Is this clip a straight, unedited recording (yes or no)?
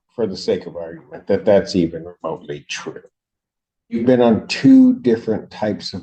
yes